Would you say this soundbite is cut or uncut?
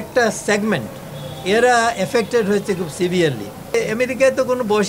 cut